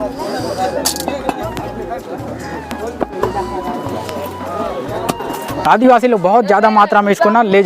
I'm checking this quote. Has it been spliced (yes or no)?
yes